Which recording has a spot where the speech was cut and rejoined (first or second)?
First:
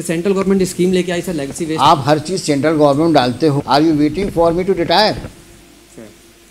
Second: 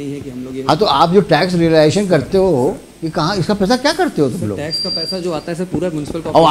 first